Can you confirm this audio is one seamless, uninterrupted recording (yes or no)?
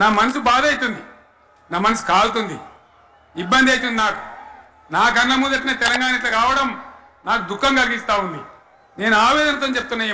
yes